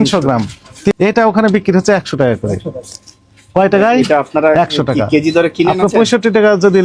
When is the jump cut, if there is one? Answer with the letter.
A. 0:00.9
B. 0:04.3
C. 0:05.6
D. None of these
A